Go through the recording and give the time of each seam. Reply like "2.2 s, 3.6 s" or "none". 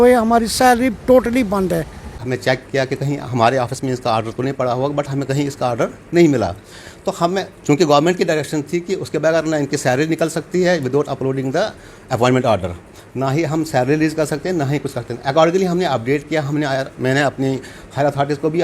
2.2 s